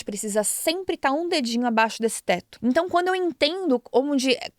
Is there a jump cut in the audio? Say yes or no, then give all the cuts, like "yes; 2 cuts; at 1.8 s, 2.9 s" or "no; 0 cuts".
yes; 1 cut; at 2.5 s